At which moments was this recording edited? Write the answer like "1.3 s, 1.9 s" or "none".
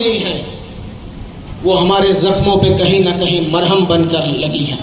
none

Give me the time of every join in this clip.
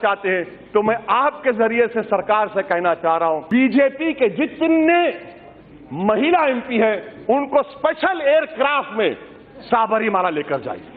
3.4 s

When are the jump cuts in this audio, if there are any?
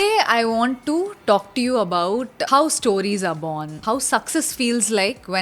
2.4 s, 3.8 s

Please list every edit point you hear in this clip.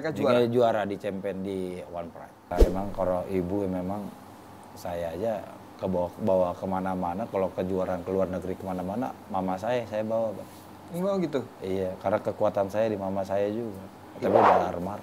2.5 s

